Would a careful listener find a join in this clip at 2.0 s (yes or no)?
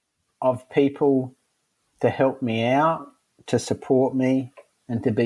no